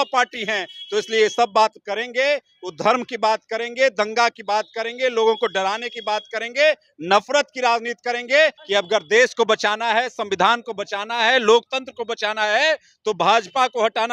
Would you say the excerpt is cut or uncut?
cut